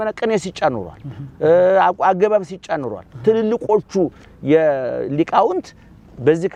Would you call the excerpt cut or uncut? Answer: uncut